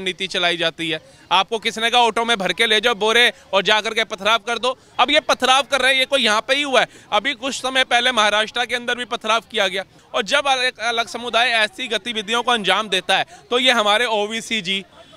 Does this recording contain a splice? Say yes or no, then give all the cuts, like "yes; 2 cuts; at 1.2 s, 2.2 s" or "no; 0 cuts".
yes; 2 cuts; at 4.8 s, 10.0 s